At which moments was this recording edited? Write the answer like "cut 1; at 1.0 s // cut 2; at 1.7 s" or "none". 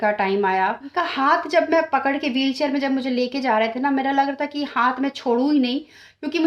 cut 1; at 1.0 s

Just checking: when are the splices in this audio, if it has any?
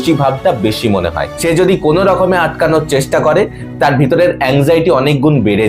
cut 1; at 1.3 s

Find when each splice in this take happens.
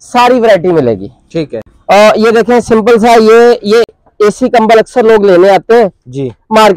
none

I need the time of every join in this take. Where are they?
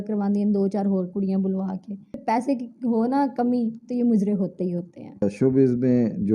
cut 1; at 2.2 s // cut 2; at 5.2 s

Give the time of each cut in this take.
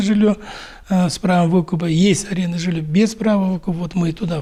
none

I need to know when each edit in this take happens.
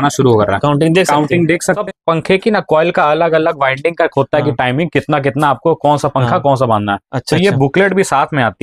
cut 1; at 1.8 s

